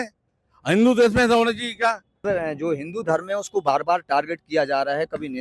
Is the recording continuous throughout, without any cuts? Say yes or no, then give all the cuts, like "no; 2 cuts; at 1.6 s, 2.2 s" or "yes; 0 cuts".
yes; 0 cuts